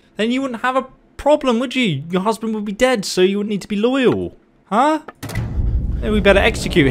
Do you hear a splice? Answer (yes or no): no